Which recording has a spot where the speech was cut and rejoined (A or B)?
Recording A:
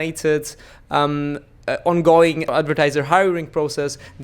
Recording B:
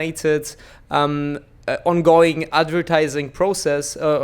A